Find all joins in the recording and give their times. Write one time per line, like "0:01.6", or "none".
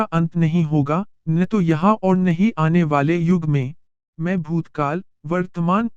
0:04.0